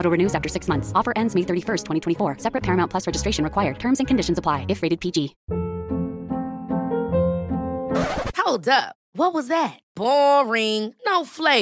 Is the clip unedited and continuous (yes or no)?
no